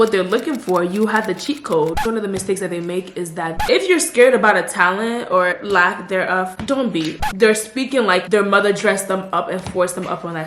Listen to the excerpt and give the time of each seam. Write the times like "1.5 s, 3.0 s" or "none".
2.0 s, 3.6 s, 5.6 s, 7.2 s